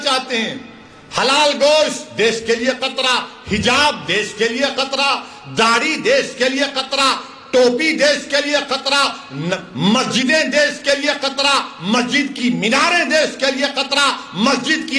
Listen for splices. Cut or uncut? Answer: uncut